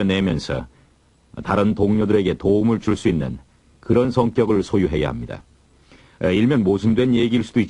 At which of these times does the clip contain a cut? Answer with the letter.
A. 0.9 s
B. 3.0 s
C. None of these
B